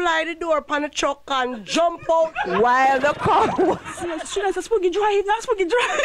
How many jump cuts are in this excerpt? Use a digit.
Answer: 1